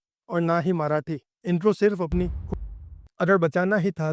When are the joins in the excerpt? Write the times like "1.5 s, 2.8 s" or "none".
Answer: 2.5 s